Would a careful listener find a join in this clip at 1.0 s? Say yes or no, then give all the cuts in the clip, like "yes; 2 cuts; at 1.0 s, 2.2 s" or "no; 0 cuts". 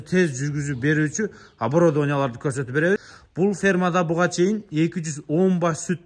no; 1 cut; at 3.2 s